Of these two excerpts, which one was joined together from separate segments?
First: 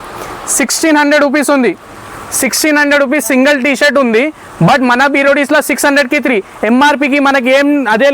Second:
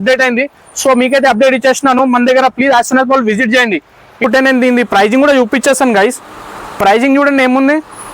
second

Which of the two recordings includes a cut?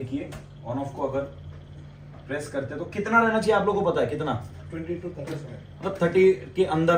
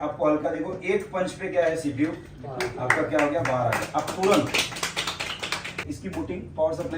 second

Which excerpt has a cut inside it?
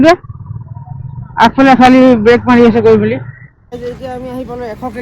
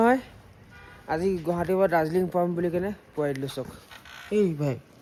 first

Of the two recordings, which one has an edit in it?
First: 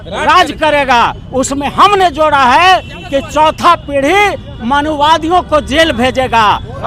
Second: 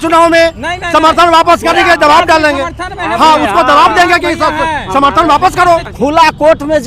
second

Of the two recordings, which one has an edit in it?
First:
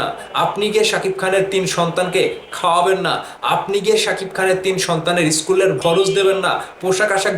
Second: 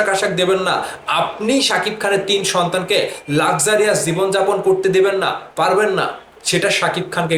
first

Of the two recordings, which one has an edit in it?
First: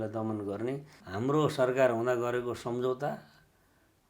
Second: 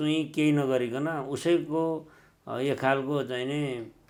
first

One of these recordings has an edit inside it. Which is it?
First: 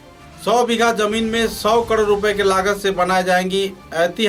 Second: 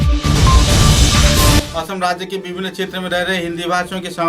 second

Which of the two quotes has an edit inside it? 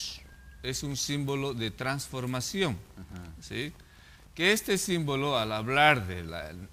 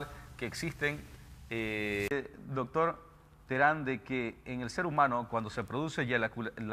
second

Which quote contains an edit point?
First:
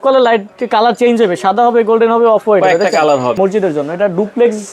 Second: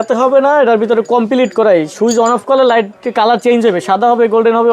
first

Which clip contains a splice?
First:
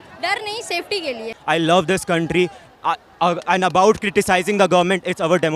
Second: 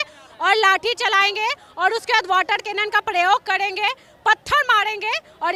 first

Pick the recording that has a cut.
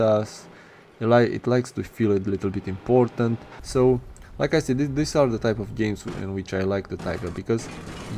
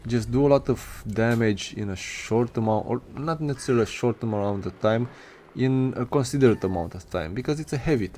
first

